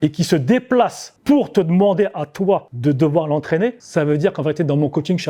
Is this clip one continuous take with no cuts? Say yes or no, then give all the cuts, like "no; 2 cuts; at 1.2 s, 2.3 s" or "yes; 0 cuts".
no; 3 cuts; at 1.1 s, 2.7 s, 3.8 s